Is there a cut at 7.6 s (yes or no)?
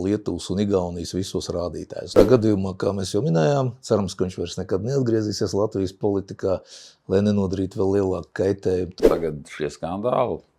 no